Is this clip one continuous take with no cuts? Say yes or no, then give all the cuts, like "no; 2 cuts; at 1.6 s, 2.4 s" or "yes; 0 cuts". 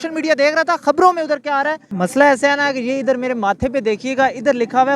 no; 1 cut; at 1.8 s